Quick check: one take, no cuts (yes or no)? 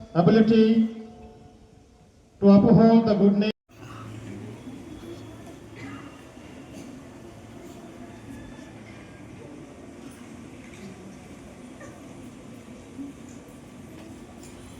no